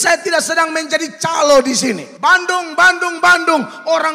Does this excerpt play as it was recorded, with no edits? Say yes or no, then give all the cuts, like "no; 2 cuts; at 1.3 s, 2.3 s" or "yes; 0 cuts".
no; 1 cut; at 2.1 s